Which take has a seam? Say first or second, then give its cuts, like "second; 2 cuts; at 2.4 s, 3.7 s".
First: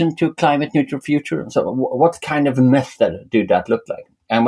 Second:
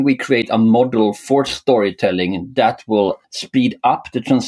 second; 1 cut; at 3.2 s